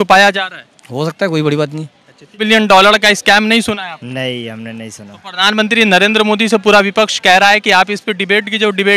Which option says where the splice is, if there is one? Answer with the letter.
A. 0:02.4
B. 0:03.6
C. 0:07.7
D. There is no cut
A